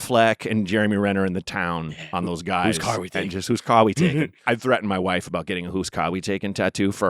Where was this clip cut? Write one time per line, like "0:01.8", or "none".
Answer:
0:04.4

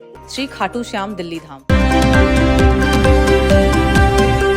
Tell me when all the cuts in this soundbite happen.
0:01.6

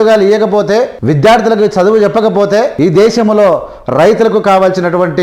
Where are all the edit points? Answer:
0:01.0
0:02.7

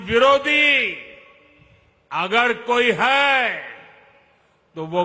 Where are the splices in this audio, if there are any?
none

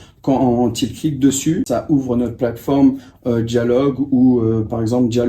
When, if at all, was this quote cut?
0:01.7

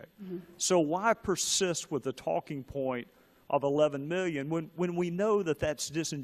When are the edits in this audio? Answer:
0:03.4

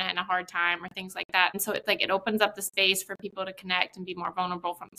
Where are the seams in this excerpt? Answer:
0:01.6

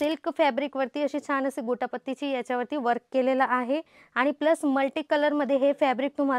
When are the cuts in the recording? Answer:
none

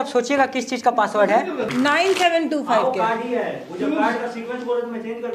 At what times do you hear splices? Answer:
0:01.7

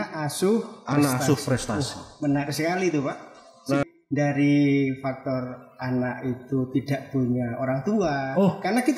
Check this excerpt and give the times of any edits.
0:03.8

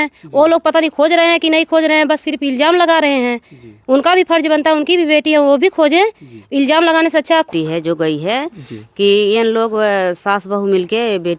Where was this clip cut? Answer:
0:07.5

